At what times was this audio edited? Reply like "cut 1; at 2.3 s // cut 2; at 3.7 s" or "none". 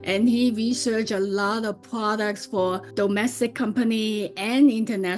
cut 1; at 2.9 s